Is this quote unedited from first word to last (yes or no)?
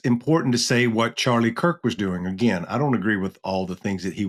yes